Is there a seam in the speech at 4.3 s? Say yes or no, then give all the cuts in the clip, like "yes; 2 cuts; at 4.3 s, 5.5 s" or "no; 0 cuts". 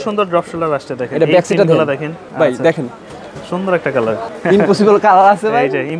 yes; 2 cuts; at 2.2 s, 4.3 s